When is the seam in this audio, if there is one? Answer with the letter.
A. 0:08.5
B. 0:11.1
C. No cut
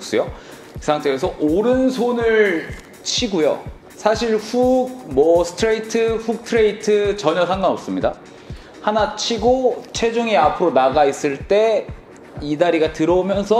C